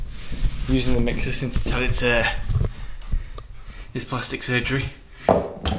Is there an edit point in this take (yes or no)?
no